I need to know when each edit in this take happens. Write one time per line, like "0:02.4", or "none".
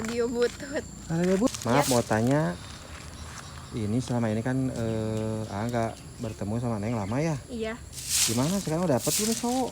0:01.5